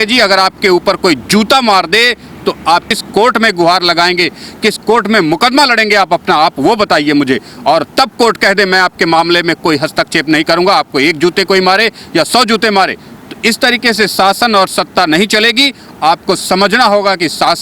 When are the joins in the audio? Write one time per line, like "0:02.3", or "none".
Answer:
0:03.0